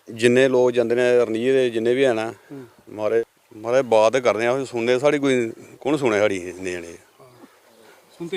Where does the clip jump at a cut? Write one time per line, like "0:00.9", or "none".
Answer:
0:03.2

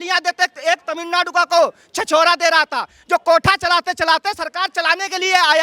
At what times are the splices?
none

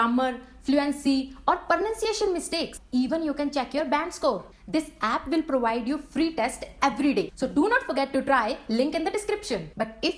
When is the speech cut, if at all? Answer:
none

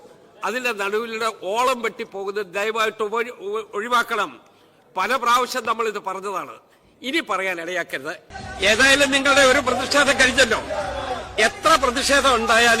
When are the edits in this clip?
0:08.2

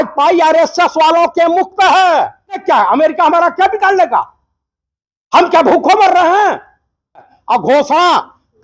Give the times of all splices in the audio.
0:02.6
0:07.3

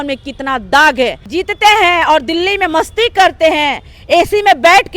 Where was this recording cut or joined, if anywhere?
0:01.2

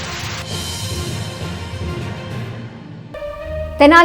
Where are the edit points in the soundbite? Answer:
0:03.0

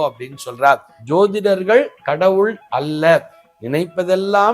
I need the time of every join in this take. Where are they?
0:00.9

